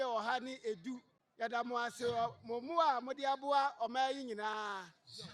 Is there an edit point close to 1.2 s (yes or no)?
yes